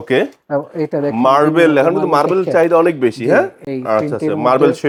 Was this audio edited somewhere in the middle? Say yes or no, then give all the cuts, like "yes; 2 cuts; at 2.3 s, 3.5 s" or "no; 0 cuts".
no; 0 cuts